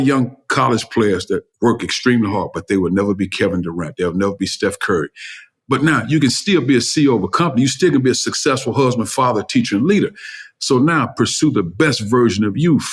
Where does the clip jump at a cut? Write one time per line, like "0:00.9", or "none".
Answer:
none